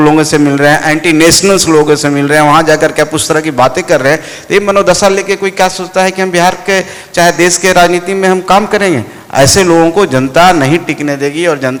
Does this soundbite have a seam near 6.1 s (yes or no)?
no